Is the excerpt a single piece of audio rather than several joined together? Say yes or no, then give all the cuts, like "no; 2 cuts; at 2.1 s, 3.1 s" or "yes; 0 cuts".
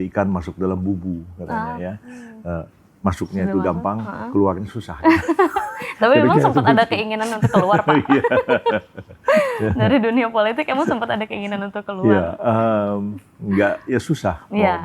yes; 0 cuts